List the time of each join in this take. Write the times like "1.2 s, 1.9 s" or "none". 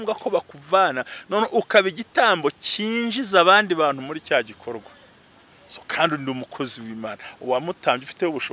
none